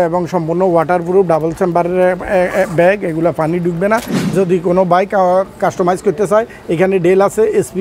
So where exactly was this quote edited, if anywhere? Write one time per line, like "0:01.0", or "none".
0:04.2